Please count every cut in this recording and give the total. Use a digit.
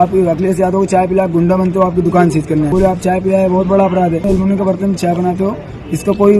2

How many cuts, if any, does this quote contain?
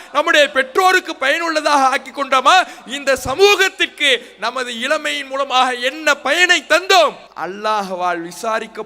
1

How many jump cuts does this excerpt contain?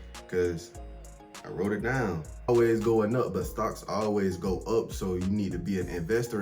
1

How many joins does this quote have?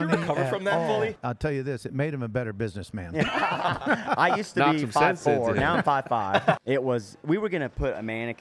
2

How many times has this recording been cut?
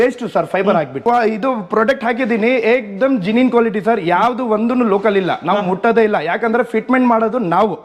1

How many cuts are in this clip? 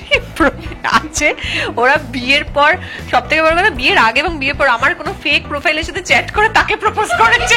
0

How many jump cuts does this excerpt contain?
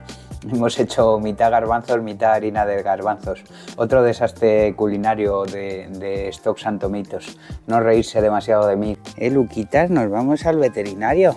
1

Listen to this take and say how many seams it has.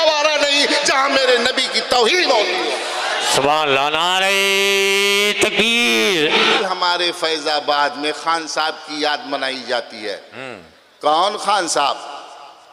1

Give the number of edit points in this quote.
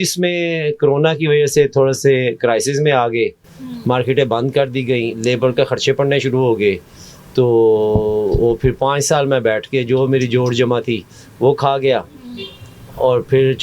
0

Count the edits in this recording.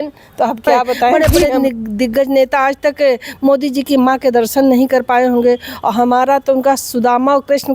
1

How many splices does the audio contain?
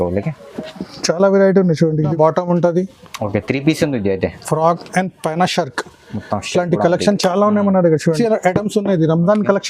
2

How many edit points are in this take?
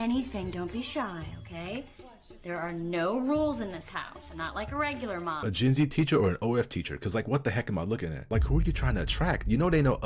2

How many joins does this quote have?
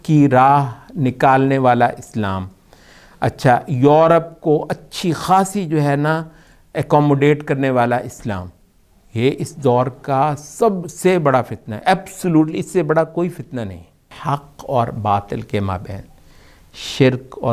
1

